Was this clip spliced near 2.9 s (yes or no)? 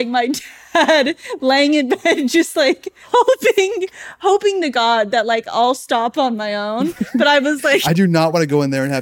yes